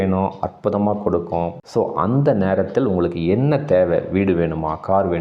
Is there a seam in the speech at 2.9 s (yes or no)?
no